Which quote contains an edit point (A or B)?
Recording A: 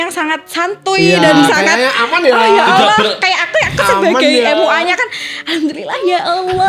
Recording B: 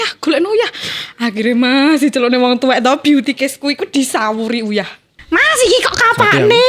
B